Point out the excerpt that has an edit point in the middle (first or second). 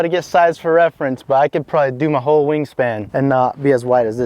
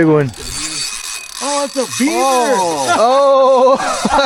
first